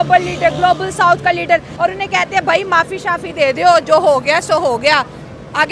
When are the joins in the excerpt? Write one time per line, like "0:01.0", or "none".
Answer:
0:01.7